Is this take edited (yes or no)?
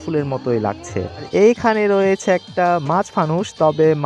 yes